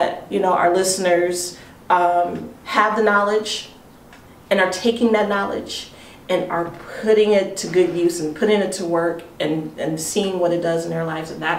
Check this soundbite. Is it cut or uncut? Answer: uncut